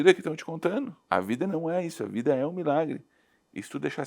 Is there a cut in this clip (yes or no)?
yes